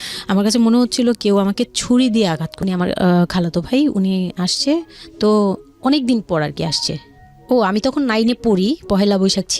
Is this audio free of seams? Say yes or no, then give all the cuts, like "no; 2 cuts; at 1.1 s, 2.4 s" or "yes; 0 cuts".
no; 1 cut; at 2.5 s